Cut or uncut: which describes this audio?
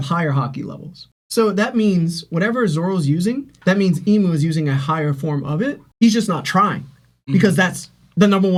uncut